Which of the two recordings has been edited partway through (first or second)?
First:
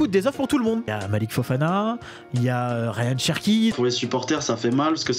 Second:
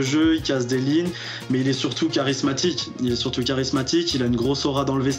first